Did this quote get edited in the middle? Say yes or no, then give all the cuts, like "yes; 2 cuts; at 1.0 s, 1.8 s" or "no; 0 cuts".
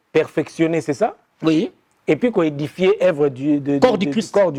no; 0 cuts